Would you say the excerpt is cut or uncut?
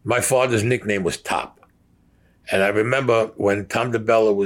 uncut